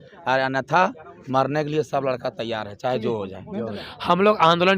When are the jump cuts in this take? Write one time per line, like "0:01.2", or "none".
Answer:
0:03.7